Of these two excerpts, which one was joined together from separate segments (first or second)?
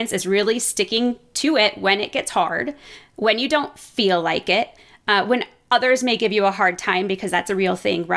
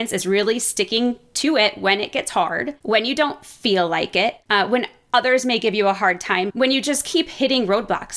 second